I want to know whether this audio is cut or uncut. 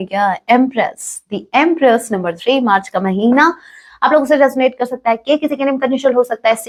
uncut